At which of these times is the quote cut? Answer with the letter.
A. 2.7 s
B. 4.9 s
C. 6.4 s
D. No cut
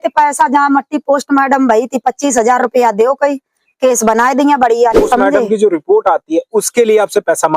B